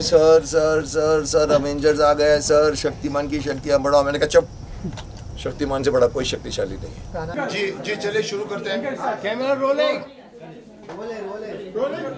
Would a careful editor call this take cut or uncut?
uncut